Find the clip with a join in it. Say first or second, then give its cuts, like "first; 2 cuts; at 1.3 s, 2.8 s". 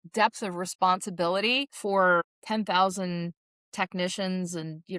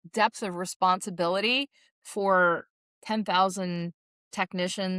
first; 2 cuts; at 1.7 s, 2.4 s